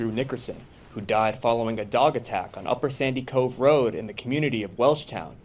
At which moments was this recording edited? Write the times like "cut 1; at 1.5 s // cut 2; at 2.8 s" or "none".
cut 1; at 2.9 s